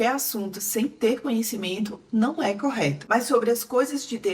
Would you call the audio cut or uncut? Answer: uncut